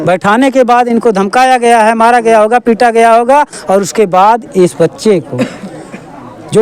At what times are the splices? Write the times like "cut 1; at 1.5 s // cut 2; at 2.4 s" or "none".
none